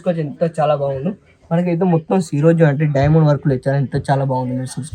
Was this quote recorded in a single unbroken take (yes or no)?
yes